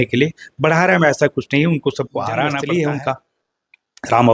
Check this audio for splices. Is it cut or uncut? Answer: cut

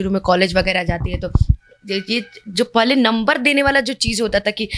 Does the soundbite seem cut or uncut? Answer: uncut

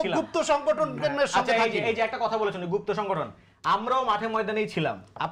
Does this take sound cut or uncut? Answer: uncut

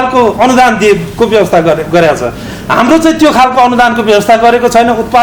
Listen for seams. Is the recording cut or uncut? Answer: uncut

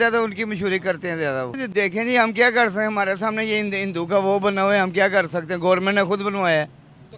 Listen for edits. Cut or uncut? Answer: cut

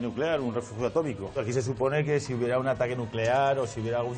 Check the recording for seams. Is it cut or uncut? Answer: cut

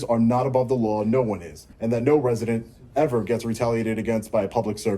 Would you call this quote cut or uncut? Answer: cut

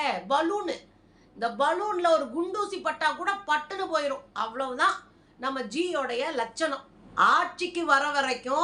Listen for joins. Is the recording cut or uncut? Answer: cut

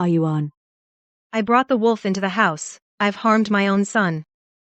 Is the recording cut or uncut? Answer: uncut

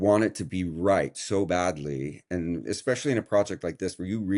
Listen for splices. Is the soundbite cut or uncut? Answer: uncut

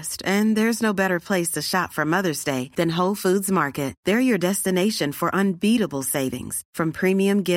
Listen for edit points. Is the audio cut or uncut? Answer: uncut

